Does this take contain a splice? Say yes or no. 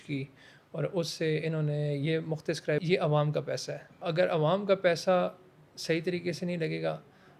yes